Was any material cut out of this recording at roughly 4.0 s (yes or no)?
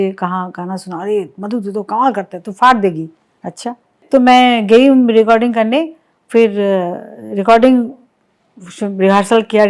yes